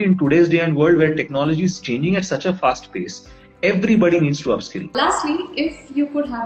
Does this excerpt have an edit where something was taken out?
yes; 1 cut; at 4.9 s

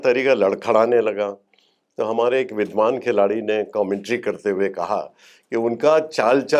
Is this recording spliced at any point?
no; 0 cuts

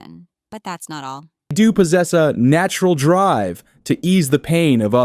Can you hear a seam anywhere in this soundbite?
yes; 1 cut; at 1.5 s

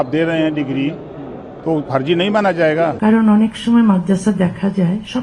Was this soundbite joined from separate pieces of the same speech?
yes; 1 cut; at 3.0 s

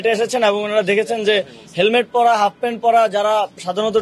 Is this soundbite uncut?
yes; 0 cuts

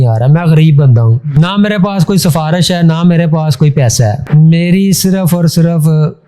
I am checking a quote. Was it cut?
yes; 2 cuts; at 1.2 s, 4.2 s

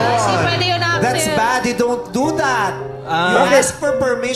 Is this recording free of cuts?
yes; 0 cuts

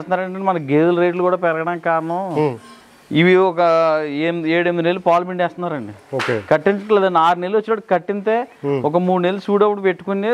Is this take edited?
no; 0 cuts

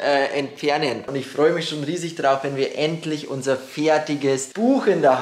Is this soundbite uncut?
no; 1 cut; at 1.1 s

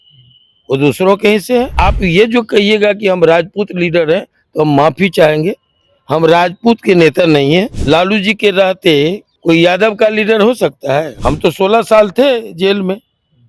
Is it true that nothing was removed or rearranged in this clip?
no; 4 cuts; at 1.7 s, 7.8 s, 9.3 s, 11.1 s

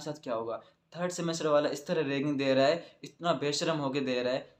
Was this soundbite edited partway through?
no; 0 cuts

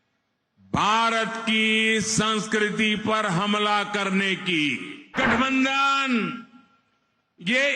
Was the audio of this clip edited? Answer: yes; 1 cut; at 5.1 s

